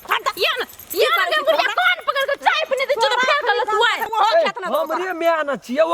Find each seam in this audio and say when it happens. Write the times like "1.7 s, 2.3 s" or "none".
4.1 s

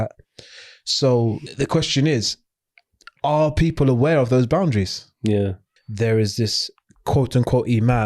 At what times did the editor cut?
1.5 s, 5.6 s

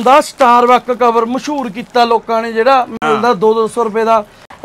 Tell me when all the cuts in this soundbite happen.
none

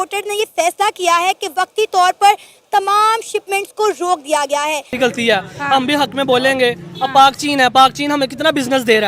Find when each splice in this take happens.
5.0 s

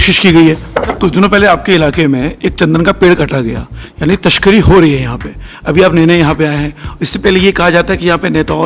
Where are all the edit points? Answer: 0.9 s

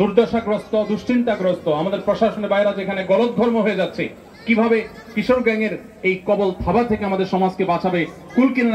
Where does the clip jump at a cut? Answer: none

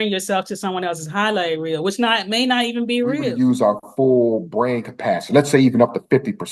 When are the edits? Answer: 3.3 s

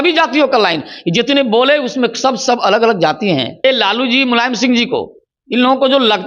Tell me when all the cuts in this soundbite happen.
3.6 s

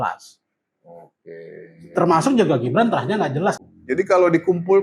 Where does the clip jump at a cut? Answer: 3.6 s

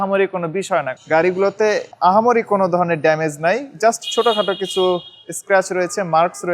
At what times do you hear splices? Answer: 0.9 s

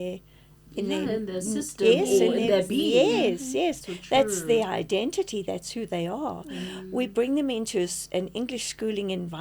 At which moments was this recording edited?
none

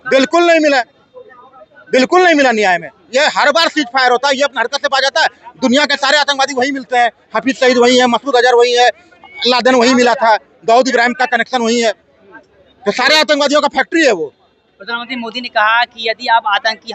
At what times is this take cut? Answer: none

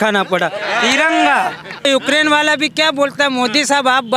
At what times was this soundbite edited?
1.9 s

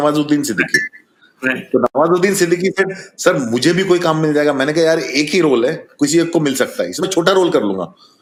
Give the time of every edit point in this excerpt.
none

